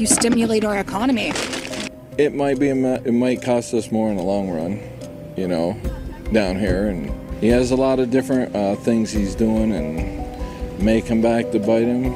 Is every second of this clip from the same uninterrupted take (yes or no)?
yes